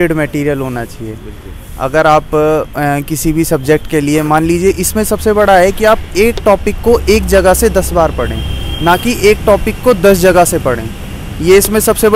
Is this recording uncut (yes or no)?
yes